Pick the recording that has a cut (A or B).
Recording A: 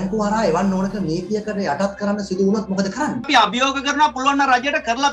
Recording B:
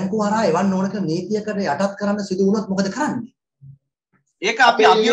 A